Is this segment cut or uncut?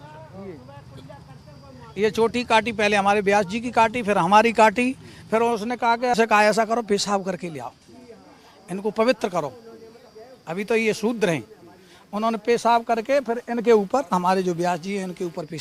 cut